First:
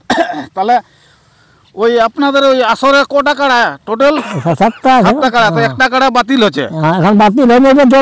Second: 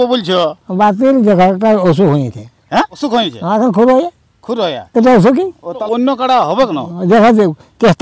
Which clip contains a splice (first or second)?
second